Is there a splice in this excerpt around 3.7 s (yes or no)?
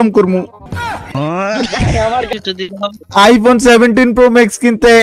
no